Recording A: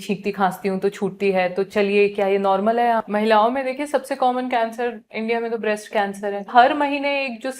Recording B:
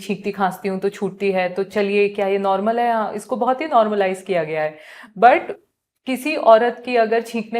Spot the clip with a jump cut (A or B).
A